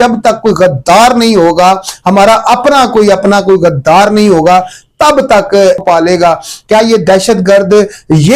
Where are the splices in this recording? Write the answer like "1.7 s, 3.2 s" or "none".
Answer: 5.8 s